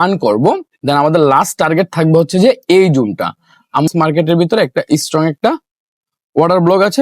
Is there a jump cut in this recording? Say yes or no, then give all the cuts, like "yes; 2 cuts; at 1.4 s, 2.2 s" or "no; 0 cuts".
yes; 1 cut; at 3.9 s